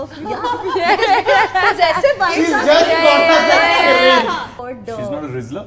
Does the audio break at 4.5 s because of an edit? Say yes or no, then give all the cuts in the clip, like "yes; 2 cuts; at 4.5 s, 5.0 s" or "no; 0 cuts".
yes; 1 cut; at 4.5 s